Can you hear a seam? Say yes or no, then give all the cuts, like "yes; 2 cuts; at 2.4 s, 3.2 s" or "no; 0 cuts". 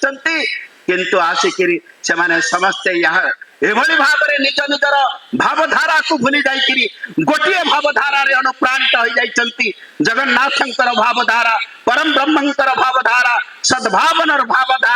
no; 0 cuts